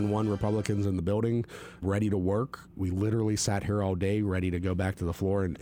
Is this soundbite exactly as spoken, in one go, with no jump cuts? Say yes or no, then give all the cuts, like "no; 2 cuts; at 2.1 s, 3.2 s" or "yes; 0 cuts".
yes; 0 cuts